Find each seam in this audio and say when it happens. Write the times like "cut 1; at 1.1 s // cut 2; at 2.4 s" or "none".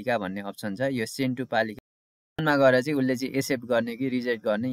cut 1; at 2.4 s